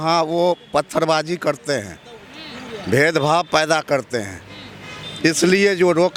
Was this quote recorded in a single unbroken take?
yes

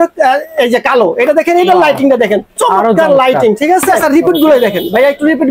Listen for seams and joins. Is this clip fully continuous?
no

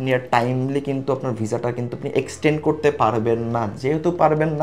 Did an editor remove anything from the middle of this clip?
no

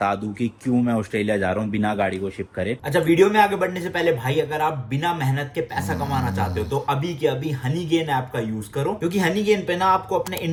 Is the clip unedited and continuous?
yes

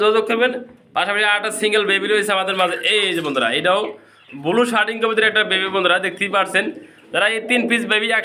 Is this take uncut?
yes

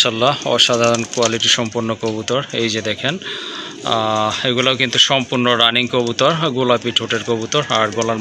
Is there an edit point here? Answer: no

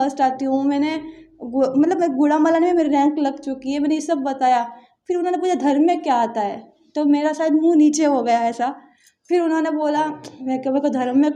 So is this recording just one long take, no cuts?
yes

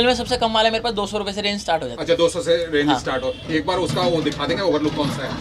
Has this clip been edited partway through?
no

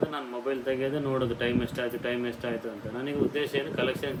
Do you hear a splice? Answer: no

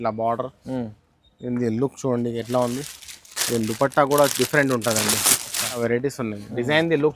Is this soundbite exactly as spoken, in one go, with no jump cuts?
no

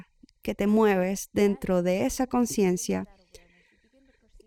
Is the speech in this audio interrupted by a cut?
no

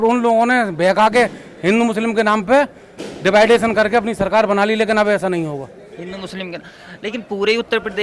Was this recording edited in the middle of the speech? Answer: no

